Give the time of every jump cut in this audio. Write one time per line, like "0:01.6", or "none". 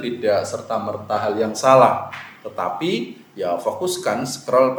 none